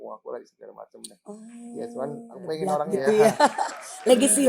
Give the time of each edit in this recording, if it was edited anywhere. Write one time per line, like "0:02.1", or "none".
0:02.9